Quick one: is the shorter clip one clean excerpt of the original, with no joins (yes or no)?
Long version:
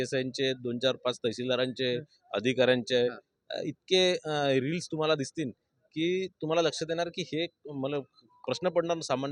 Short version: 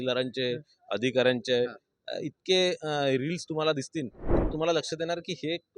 no